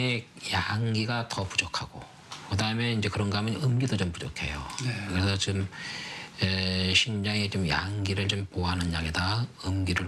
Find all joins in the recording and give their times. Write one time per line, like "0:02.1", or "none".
none